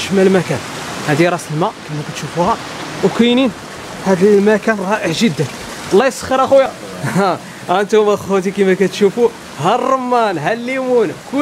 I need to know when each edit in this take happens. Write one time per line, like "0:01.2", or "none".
0:06.8